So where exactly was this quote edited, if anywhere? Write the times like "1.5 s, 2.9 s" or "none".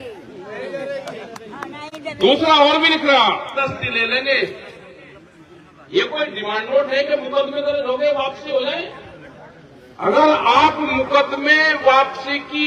3.6 s, 8.2 s

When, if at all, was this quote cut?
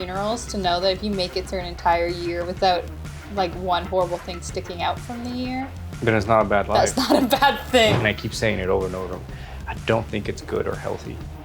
8.0 s

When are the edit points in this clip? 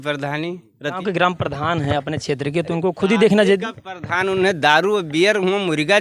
1.0 s

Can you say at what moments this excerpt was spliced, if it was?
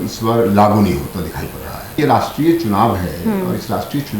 2.0 s

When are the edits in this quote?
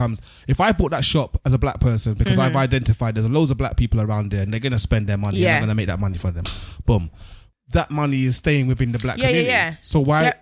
7.4 s

